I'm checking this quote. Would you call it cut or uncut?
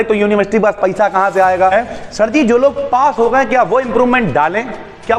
cut